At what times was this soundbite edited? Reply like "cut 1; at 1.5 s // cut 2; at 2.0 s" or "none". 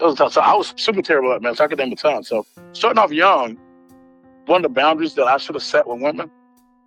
none